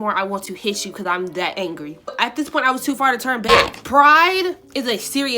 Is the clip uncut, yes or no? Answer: no